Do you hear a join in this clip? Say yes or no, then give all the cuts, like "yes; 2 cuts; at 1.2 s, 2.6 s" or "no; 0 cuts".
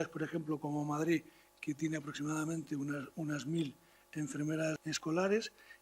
yes; 1 cut; at 4.8 s